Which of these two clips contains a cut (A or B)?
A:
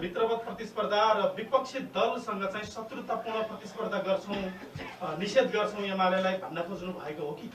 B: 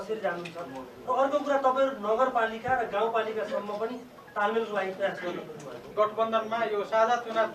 B